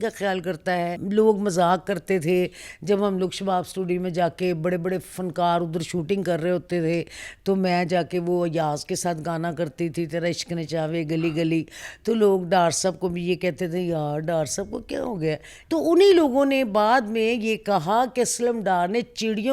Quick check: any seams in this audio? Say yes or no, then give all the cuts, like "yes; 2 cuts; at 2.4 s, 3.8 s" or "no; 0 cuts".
yes; 2 cuts; at 1.0 s, 15.5 s